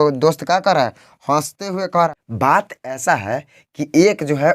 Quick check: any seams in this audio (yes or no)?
yes